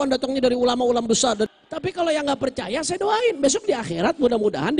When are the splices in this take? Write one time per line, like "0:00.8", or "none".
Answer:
0:01.5

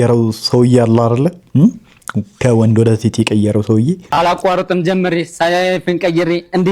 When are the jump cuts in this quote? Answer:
0:04.0

